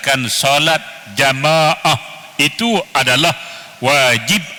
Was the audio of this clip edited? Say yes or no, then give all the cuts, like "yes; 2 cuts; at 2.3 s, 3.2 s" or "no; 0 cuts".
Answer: no; 0 cuts